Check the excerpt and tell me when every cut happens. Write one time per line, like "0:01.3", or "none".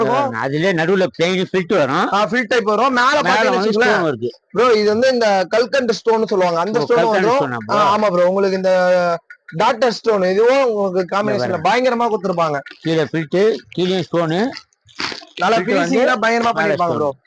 none